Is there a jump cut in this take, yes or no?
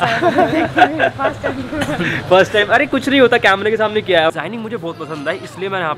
yes